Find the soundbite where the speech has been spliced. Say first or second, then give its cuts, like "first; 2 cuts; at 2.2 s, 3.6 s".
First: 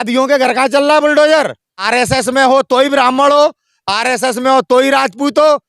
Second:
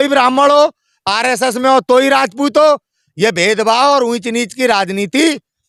first; 1 cut; at 1.8 s